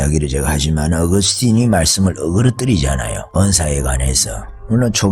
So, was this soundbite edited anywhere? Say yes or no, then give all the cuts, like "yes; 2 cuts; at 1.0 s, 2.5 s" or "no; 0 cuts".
yes; 1 cut; at 3.2 s